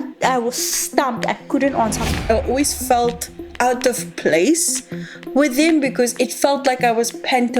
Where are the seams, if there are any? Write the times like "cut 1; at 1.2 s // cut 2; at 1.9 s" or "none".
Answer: cut 1; at 2.2 s